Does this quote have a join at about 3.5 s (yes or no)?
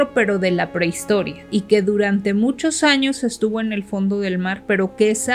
no